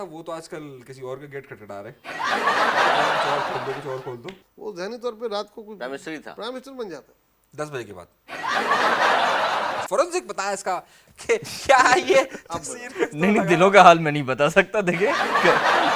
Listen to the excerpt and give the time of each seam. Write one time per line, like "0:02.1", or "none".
0:04.4
0:09.8